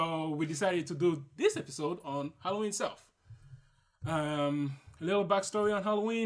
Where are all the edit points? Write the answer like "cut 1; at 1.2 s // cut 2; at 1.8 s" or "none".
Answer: cut 1; at 5.3 s